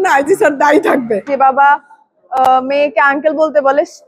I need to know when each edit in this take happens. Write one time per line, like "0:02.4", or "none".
0:01.3